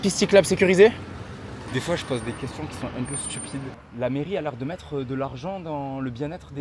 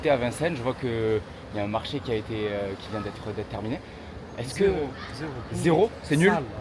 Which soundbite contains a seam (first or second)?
first